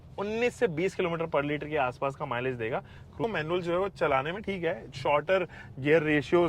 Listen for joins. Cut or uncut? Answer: cut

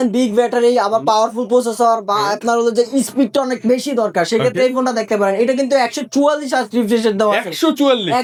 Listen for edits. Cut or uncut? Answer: uncut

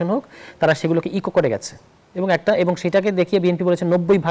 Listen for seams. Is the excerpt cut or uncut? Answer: uncut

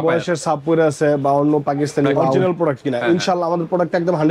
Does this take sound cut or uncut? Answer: cut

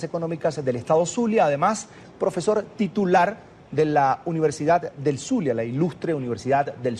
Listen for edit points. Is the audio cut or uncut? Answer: cut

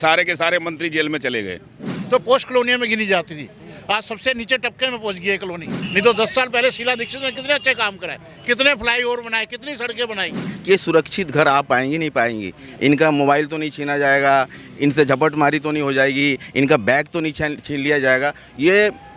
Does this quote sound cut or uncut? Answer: cut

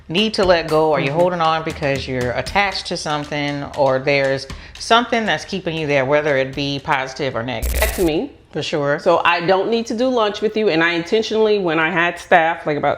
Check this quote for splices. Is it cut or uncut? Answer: cut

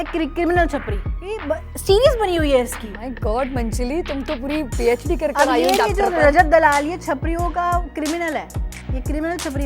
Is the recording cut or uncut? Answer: cut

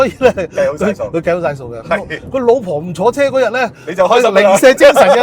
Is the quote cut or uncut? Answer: uncut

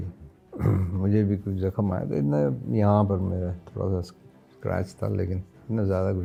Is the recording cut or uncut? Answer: uncut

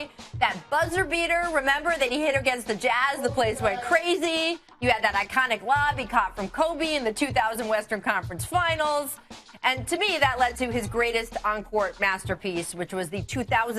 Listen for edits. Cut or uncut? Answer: cut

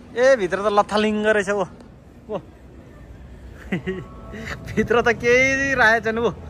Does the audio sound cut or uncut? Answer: uncut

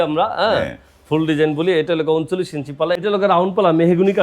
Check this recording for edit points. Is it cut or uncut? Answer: cut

